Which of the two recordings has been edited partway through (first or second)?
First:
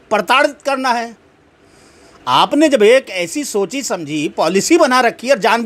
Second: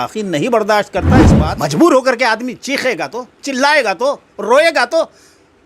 second